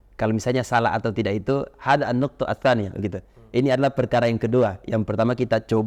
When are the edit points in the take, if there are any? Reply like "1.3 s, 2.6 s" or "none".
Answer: none